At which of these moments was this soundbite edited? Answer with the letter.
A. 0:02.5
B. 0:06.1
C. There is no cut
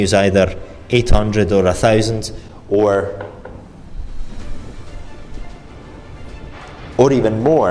C